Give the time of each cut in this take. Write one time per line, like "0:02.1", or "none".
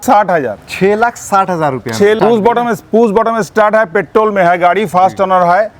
0:02.2